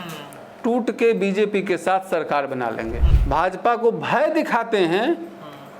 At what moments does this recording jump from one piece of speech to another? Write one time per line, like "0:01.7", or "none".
0:03.1